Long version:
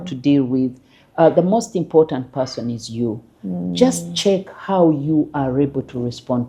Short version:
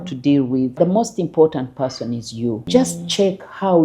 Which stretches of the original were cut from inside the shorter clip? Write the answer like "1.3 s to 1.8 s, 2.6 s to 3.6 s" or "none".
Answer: 0.8 s to 1.3 s, 3.2 s to 3.7 s